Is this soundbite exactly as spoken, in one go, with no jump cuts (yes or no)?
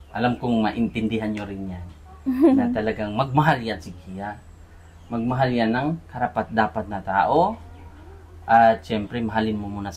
yes